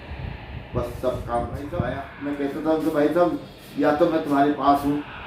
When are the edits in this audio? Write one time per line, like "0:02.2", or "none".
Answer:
0:02.0